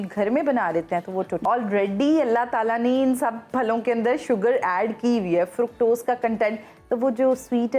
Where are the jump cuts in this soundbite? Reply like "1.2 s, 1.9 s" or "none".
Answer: 1.4 s